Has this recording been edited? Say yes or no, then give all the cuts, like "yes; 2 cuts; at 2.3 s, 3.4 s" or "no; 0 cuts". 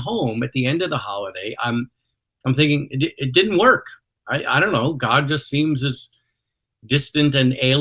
no; 0 cuts